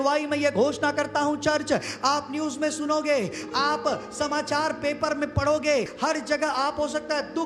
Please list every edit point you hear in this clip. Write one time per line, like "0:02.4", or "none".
0:05.9